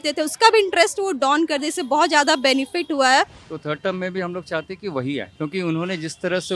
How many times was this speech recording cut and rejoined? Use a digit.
1